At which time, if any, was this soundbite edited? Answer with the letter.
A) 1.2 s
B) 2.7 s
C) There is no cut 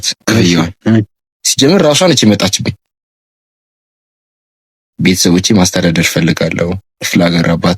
A